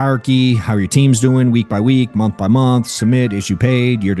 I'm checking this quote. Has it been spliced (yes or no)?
no